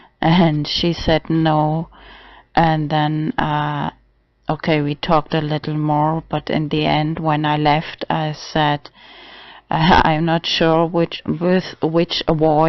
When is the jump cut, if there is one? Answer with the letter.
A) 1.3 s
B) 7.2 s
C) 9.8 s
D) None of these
B